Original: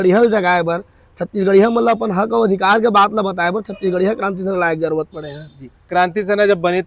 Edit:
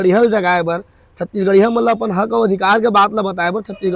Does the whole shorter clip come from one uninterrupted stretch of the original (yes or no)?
yes